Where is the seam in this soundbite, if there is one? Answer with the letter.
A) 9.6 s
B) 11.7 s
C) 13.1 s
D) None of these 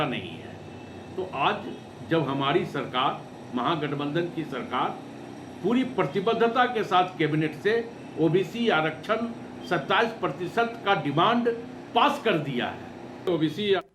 C